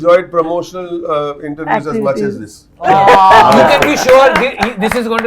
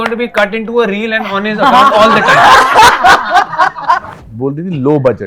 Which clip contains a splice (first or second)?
second